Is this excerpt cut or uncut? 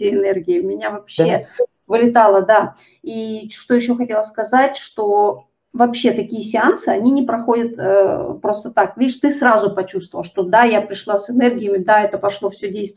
uncut